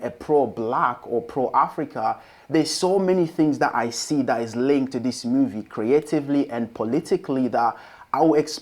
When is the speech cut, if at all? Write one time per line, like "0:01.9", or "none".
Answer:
none